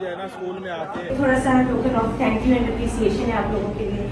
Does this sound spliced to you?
yes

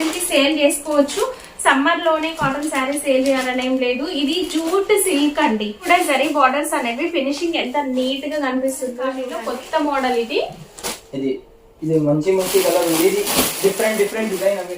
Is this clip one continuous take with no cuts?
no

